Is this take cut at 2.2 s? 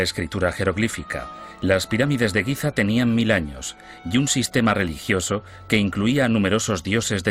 yes; 1 cut; at 2.2 s

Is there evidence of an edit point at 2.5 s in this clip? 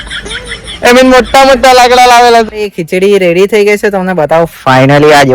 yes; 1 cut; at 2.5 s

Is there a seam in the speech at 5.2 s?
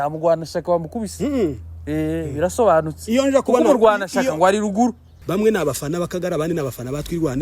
yes; 1 cut; at 5.2 s

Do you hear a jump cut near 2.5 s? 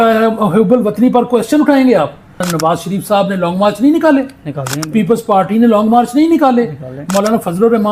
yes; 1 cut; at 2.5 s

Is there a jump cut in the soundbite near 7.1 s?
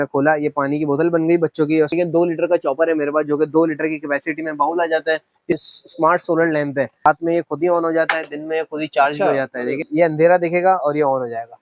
yes; 4 cuts; at 1.9 s, 5.6 s, 7.1 s, 9.8 s

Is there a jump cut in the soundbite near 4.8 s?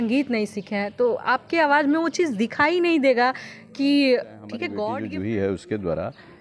yes; 1 cut; at 4.8 s

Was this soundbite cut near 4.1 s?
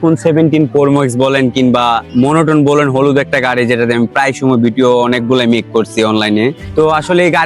no; 2 cuts; at 2.0 s, 6.6 s

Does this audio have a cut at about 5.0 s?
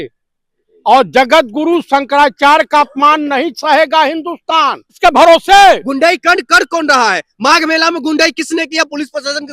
yes; 1 cut; at 5.0 s

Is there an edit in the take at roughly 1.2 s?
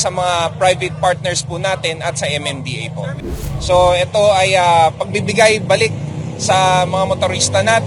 no; 1 cut; at 3.3 s

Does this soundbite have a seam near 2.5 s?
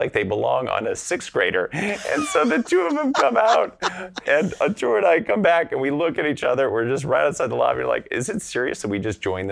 no; 1 cut; at 4.2 s

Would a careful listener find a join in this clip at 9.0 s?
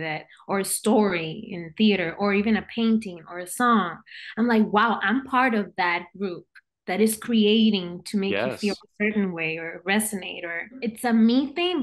no; 1 cut; at 10.8 s

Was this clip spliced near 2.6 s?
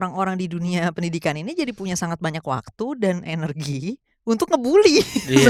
no; 0 cuts

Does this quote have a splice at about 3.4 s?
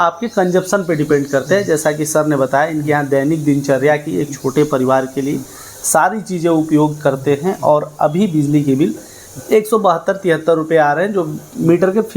no; 0 cuts

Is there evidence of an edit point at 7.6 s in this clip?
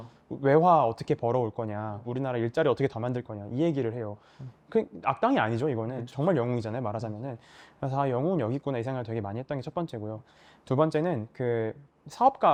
no; 0 cuts

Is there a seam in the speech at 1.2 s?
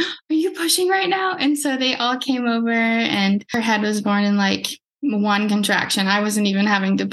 no; 1 cut; at 3.5 s

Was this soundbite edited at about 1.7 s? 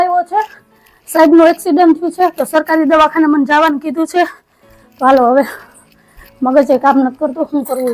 no; 0 cuts

